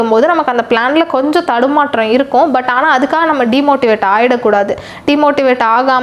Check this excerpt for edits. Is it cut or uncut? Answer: uncut